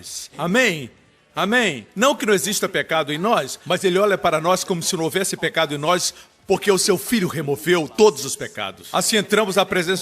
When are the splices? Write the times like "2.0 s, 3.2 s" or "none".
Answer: 1.4 s